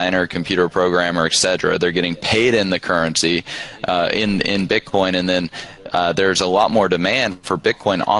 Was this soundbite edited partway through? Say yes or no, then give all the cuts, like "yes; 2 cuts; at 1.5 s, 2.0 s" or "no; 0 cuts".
no; 0 cuts